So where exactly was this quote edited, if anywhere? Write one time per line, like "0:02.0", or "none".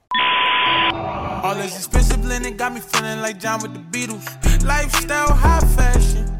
0:00.9